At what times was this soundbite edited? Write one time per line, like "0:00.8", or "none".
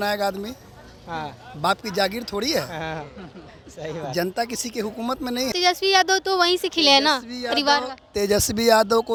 none